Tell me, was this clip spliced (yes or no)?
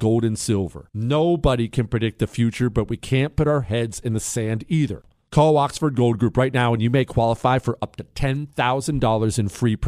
yes